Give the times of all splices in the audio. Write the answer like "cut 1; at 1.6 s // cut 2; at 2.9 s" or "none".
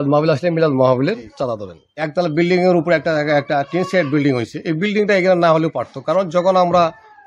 cut 1; at 1.6 s